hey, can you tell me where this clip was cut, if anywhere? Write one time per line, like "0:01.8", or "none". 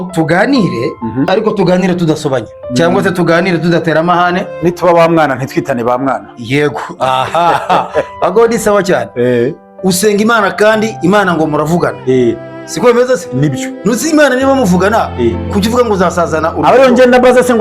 0:01.3
0:02.6
0:09.7

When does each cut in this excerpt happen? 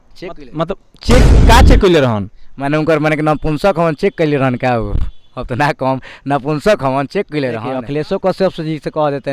0:07.8

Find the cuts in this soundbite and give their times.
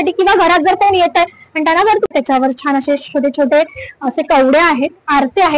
0:02.1

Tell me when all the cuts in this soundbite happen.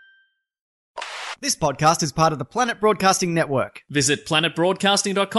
0:01.2

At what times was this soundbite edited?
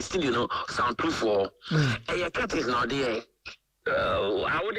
0:03.7

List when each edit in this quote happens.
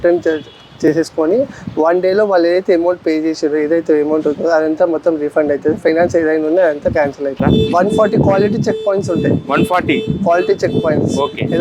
0:07.4

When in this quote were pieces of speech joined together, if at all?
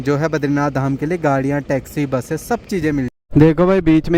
0:03.1

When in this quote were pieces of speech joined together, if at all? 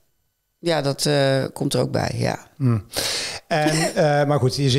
none

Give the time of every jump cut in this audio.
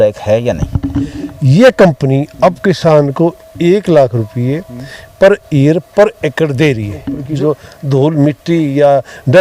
0:01.1
0:07.2

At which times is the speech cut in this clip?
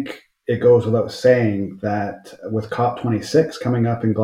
none

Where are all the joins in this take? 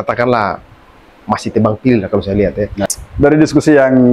0:02.8

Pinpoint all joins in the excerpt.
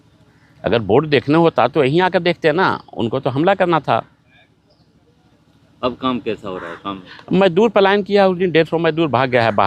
none

